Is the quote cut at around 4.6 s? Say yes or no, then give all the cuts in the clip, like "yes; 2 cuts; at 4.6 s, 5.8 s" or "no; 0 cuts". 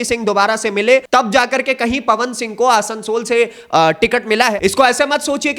yes; 2 cuts; at 1.0 s, 4.6 s